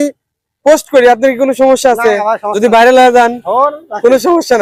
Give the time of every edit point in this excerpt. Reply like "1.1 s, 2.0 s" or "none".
none